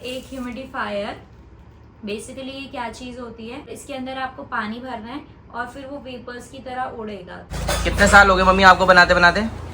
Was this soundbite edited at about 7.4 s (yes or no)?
yes